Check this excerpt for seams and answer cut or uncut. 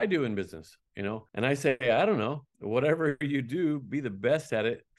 cut